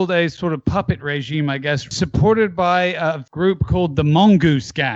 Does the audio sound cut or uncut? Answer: cut